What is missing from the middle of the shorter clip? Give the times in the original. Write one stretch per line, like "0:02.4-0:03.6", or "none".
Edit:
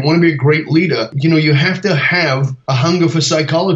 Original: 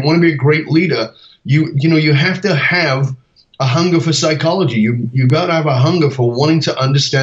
0:01.1-0:01.7
0:03.1-0:03.5